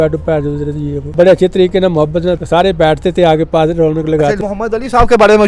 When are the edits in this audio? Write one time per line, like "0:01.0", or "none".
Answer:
0:01.0
0:02.4
0:04.4